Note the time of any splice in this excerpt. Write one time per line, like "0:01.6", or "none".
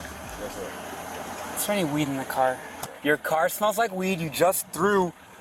0:02.9